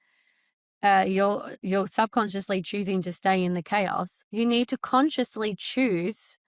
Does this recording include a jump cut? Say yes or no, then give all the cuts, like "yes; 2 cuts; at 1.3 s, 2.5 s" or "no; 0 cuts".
yes; 1 cut; at 4.2 s